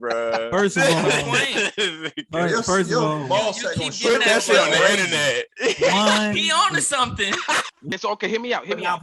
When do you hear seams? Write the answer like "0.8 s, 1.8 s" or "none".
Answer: 7.9 s